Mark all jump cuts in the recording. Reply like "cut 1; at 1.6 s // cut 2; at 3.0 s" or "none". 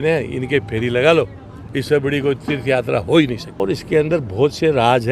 cut 1; at 3.5 s